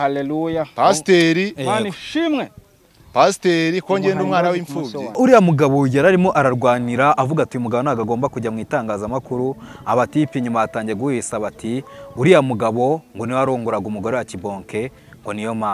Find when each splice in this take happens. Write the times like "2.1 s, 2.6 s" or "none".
5.2 s